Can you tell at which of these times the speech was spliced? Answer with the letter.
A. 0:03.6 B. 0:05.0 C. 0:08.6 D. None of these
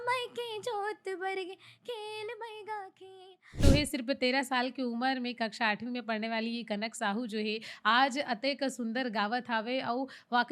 A